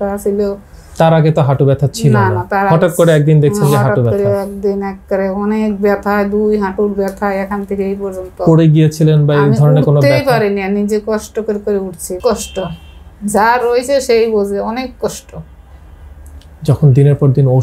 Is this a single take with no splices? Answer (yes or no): no